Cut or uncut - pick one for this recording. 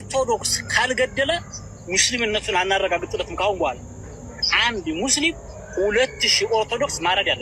uncut